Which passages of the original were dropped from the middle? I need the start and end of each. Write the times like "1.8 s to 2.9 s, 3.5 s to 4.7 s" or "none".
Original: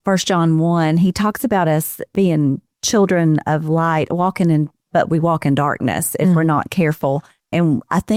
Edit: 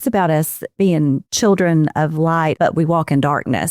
2.7 s to 2.8 s, 4.1 s to 4.9 s